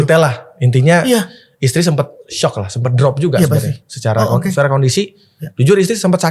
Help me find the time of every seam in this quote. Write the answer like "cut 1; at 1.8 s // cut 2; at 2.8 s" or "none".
none